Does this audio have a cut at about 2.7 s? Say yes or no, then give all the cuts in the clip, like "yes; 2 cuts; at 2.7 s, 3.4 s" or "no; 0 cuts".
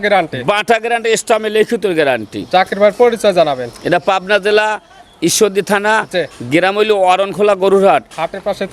no; 0 cuts